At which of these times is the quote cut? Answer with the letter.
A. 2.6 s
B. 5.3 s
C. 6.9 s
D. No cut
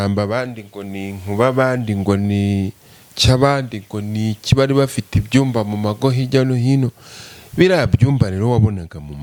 D